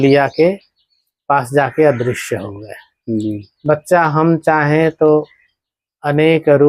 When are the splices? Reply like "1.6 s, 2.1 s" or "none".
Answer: 3.5 s